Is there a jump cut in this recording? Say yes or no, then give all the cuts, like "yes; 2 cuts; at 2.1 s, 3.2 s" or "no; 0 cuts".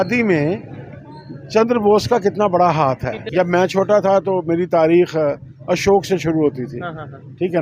yes; 1 cut; at 3.1 s